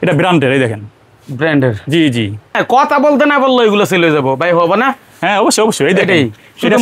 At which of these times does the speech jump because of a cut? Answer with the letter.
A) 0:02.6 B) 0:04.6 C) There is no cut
A